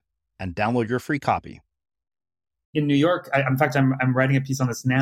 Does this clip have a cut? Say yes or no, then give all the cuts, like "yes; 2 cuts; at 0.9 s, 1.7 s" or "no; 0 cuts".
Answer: yes; 1 cut; at 2.7 s